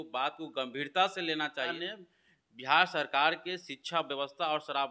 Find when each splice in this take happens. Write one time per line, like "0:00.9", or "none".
0:01.7